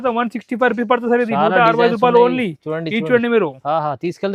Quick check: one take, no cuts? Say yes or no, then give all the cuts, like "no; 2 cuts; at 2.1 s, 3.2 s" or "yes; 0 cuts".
yes; 0 cuts